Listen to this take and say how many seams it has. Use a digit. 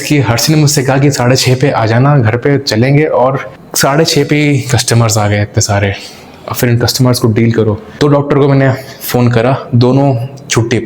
1